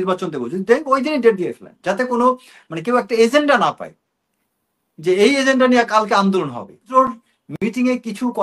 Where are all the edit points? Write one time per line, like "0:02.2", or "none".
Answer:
0:06.9